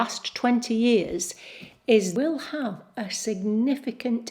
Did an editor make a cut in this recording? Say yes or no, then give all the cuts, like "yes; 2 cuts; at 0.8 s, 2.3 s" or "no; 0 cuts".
yes; 1 cut; at 2.1 s